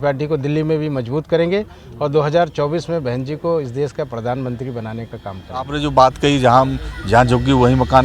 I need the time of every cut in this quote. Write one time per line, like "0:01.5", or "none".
0:05.7